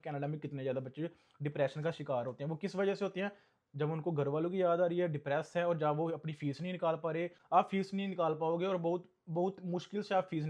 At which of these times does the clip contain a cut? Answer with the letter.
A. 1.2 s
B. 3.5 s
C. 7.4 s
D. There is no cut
C